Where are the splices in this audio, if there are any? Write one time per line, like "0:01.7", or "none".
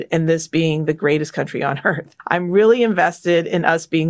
0:02.1